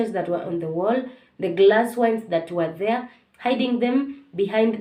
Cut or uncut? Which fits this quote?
uncut